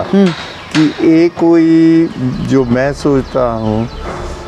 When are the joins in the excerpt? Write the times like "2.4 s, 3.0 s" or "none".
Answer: none